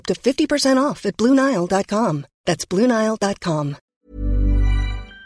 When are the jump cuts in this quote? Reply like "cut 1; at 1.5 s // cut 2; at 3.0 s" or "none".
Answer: cut 1; at 3.9 s